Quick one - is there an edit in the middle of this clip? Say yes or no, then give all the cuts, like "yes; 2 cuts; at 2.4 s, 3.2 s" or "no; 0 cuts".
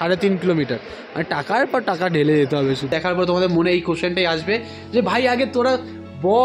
yes; 1 cut; at 2.9 s